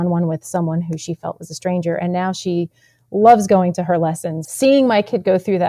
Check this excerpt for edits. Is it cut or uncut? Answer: cut